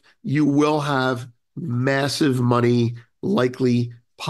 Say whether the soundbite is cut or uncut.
uncut